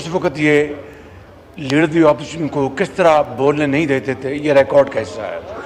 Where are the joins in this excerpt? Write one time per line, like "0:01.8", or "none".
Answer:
none